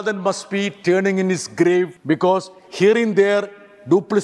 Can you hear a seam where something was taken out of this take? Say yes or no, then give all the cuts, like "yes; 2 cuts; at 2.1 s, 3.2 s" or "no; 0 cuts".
yes; 1 cut; at 2.0 s